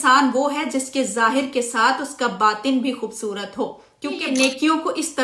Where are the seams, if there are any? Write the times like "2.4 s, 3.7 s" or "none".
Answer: 4.2 s